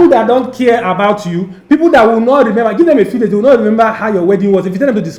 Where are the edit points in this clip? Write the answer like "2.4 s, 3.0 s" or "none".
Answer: none